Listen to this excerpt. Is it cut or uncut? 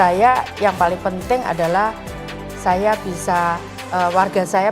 cut